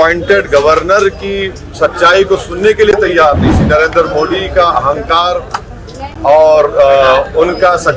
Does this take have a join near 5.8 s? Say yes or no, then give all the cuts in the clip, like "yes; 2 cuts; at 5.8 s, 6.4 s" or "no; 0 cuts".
no; 1 cut; at 3.6 s